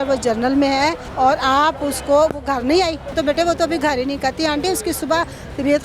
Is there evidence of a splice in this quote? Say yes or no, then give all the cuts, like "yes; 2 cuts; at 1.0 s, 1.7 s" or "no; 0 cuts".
yes; 2 cuts; at 1.0 s, 3.1 s